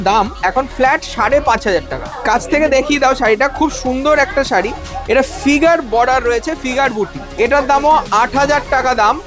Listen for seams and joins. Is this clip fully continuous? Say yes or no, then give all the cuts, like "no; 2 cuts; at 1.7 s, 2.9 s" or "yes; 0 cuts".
no; 2 cuts; at 2.0 s, 7.2 s